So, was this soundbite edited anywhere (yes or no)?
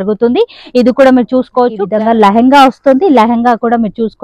yes